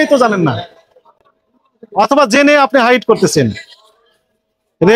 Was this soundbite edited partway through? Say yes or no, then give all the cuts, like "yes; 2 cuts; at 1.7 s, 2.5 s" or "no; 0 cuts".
no; 0 cuts